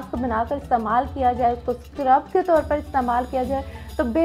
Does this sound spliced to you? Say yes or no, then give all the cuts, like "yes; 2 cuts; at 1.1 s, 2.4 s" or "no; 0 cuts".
no; 0 cuts